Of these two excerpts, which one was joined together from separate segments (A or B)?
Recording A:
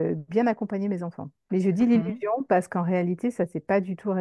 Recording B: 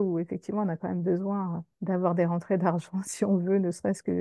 B